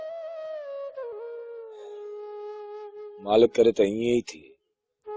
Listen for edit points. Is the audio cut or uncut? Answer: cut